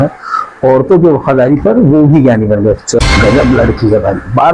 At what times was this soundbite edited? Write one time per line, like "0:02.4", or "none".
0:03.0